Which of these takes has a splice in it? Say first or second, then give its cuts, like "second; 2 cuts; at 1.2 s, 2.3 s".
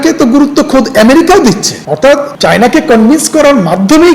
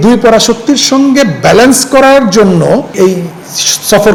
first; 1 cut; at 1.9 s